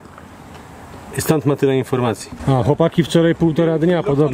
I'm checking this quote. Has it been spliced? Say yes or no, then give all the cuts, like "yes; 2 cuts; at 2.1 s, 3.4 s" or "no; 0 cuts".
yes; 1 cut; at 2.3 s